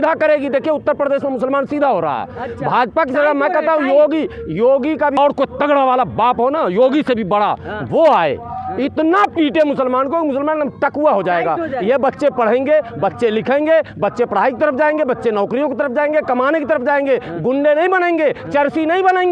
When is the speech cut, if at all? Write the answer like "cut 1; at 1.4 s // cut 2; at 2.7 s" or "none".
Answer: cut 1; at 5.2 s